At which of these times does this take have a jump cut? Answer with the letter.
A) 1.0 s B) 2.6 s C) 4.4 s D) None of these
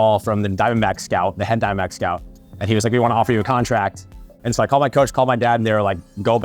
C